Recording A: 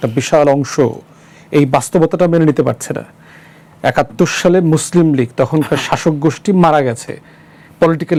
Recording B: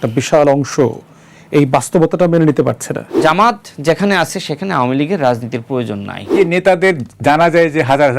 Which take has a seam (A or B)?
B